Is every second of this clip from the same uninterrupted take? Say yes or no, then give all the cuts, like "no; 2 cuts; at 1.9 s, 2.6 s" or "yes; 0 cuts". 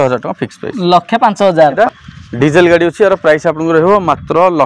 no; 1 cut; at 1.8 s